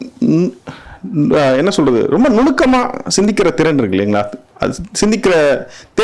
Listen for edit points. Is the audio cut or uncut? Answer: uncut